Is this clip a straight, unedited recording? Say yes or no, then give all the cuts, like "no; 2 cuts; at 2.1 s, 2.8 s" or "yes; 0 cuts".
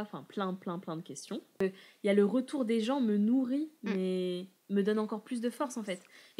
no; 1 cut; at 1.6 s